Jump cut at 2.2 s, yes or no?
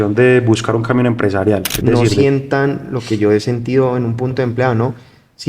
yes